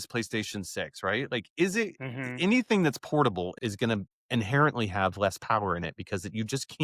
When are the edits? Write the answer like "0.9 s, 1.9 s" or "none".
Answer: 3.6 s

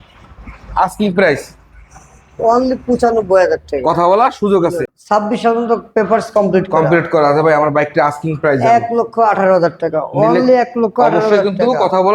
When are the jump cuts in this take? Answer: 4.9 s

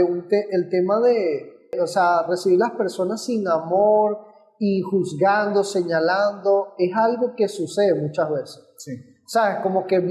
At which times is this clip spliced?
1.7 s

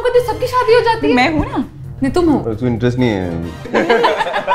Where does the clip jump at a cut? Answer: 2.5 s, 3.7 s

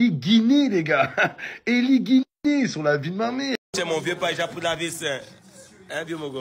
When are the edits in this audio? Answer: 3.7 s

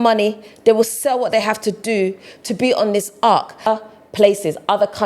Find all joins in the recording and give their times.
3.7 s

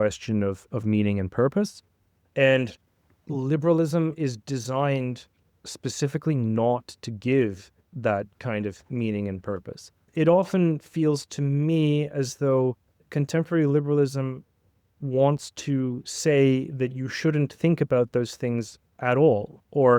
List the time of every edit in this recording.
10.1 s, 12.9 s

